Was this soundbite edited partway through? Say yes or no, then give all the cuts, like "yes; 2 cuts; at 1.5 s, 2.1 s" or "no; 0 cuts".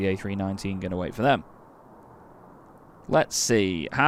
no; 0 cuts